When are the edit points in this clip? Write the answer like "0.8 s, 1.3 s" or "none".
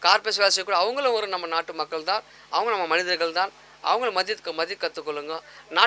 none